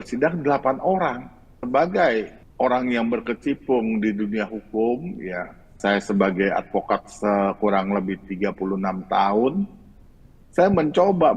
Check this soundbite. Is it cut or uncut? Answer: cut